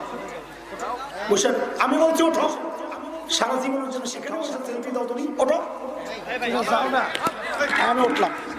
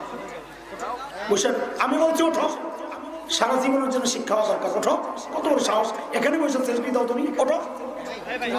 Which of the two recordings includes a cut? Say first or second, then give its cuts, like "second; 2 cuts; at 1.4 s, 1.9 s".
first; 1 cut; at 4.5 s